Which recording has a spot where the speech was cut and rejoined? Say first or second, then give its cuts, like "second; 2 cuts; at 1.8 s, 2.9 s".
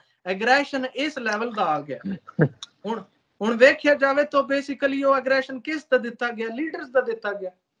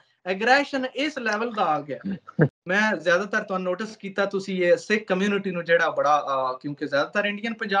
second; 1 cut; at 2.6 s